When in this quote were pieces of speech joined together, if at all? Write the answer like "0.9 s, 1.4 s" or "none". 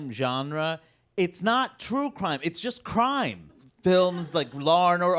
3.6 s